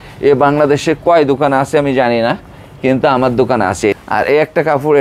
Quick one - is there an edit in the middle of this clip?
yes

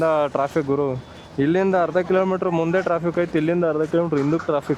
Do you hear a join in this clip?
no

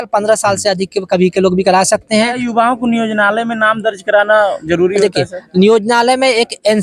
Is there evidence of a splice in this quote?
yes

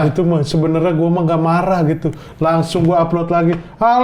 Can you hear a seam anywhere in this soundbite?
no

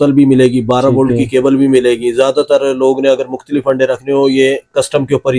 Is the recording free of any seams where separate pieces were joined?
yes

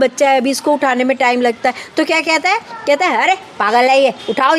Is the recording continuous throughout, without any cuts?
yes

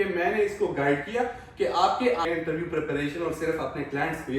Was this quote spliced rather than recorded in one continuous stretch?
yes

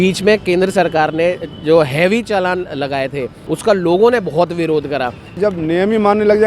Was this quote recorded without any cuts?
no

